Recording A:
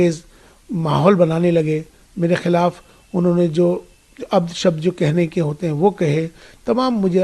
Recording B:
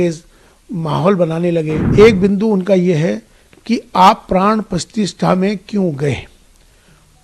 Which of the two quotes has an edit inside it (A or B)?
B